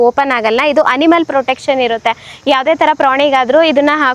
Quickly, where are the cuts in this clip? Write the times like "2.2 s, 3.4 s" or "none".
none